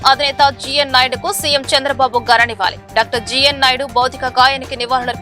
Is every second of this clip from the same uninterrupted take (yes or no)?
yes